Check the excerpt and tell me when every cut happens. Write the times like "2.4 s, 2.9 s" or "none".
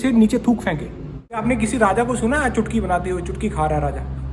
1.4 s